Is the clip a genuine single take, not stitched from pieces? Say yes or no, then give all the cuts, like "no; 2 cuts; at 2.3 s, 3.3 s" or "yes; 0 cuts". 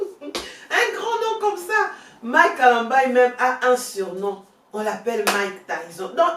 yes; 0 cuts